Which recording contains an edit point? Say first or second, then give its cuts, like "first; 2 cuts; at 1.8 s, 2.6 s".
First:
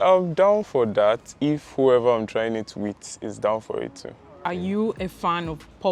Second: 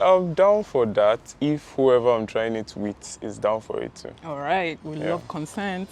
first; 1 cut; at 4.2 s